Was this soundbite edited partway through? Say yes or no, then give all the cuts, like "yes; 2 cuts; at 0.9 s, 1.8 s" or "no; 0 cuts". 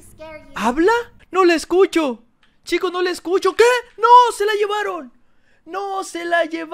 yes; 1 cut; at 1.2 s